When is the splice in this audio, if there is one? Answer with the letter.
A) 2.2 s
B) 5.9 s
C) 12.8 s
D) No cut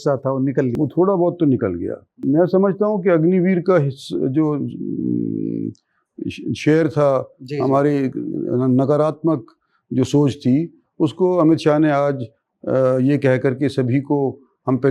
A